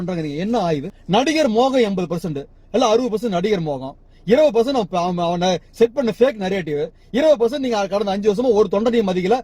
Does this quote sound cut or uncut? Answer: uncut